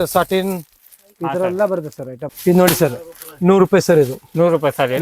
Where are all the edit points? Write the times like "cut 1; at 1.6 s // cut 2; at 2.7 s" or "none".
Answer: cut 1; at 2.2 s